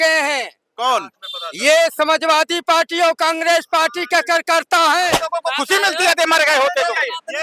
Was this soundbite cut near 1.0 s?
no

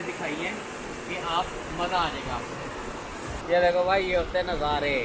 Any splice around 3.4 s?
yes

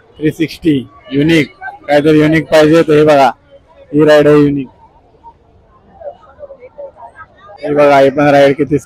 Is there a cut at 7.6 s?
yes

